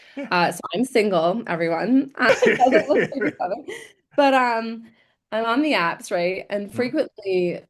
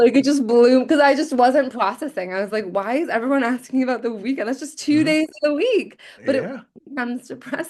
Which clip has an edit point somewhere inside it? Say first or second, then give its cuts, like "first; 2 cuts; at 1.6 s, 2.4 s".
first; 1 cut; at 2.3 s